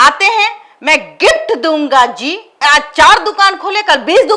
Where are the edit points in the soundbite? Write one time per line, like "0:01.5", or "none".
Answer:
0:02.6